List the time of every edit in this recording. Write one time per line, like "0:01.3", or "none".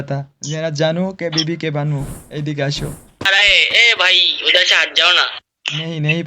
0:03.3